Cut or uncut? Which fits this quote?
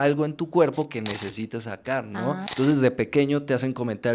cut